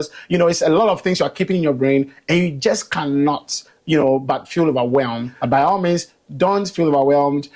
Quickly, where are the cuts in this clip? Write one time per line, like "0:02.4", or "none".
0:05.3